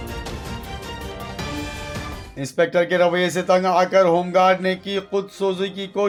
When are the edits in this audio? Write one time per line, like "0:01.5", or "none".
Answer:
none